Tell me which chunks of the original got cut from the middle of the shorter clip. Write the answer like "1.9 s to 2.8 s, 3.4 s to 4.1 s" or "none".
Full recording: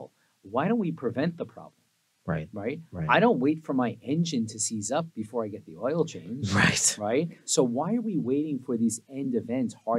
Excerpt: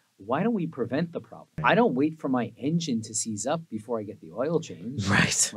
1.7 s to 2.9 s